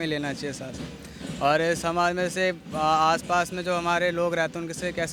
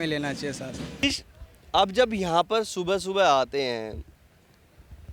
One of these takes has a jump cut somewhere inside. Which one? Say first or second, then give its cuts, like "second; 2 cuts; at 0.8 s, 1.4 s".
second; 1 cut; at 1.0 s